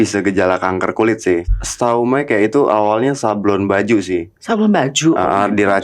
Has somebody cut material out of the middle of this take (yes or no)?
yes